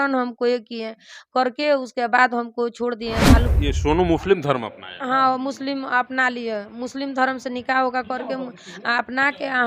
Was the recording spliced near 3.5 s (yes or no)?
yes